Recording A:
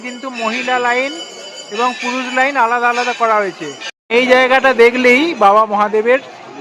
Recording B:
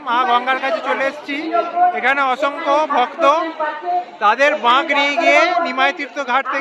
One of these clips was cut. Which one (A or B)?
A